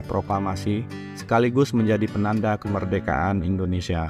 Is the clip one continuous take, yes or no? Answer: yes